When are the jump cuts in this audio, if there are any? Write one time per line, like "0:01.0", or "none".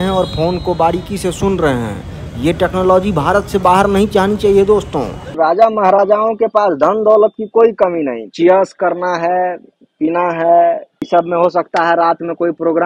0:05.2
0:08.2
0:10.9